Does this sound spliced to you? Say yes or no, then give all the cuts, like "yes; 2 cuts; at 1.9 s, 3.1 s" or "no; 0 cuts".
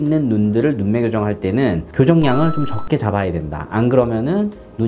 yes; 1 cut; at 1.8 s